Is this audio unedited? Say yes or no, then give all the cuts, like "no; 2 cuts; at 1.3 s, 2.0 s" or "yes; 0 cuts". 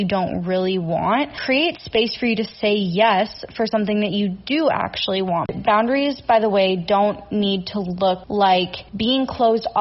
no; 4 cuts; at 1.4 s, 5.5 s, 8.2 s, 8.8 s